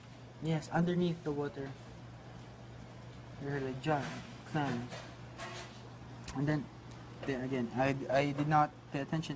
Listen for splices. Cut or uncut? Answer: cut